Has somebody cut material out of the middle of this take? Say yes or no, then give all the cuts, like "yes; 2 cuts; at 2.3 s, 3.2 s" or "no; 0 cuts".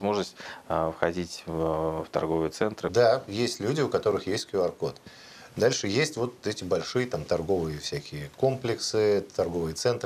yes; 1 cut; at 2.9 s